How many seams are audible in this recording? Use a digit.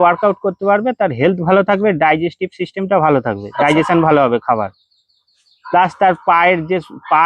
0